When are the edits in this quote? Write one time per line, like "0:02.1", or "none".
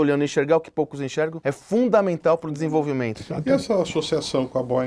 0:03.2